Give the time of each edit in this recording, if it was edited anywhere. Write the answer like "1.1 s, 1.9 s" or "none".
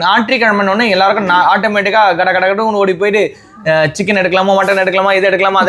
none